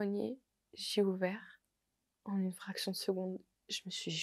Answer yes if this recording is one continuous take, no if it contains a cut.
yes